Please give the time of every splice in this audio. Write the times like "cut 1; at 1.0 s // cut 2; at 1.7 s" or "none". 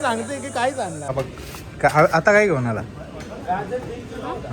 cut 1; at 1.1 s

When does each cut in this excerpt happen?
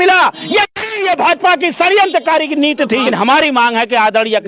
cut 1; at 3.1 s

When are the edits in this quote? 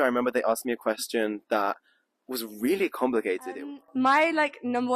cut 1; at 3.5 s

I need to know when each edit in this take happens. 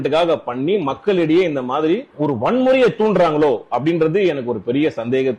cut 1; at 2.1 s

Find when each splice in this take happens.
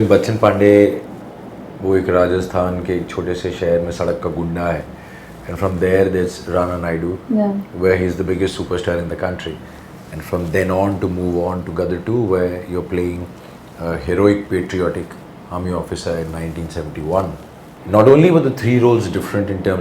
none

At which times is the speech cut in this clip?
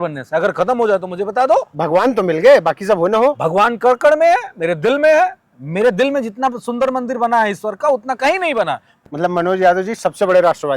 cut 1; at 8.9 s

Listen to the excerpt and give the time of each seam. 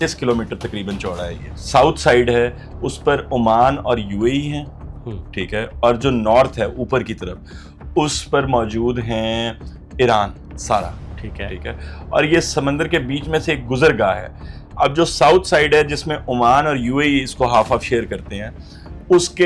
none

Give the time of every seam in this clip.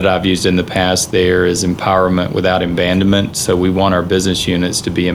none

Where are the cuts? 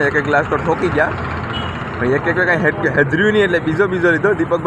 none

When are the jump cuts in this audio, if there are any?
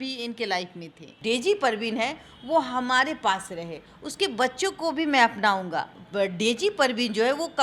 cut 1; at 1.1 s // cut 2; at 6.0 s

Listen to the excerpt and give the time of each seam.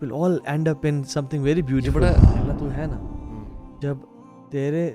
cut 1; at 2.3 s

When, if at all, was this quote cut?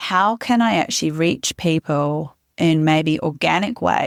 none

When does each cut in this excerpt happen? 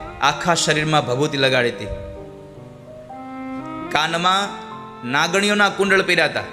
none

